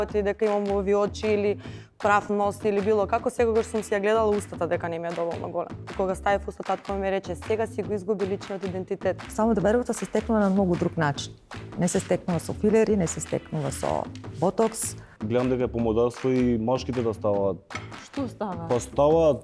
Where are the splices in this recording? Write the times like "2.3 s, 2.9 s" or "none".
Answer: 5.9 s, 9.2 s, 15.2 s